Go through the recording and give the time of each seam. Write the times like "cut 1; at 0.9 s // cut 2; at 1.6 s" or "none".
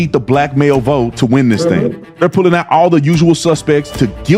cut 1; at 2.2 s